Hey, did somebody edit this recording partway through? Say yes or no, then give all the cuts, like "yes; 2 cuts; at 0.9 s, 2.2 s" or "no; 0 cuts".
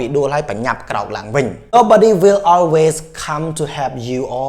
yes; 1 cut; at 1.7 s